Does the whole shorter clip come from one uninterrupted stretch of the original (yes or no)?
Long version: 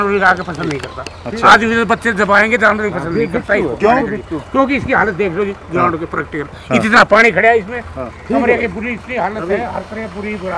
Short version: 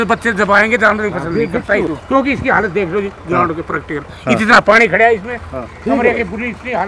no